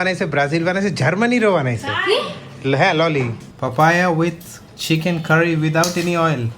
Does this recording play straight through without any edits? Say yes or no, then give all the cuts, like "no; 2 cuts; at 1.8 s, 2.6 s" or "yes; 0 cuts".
no; 1 cut; at 3.4 s